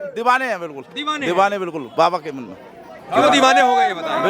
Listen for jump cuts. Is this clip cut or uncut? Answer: uncut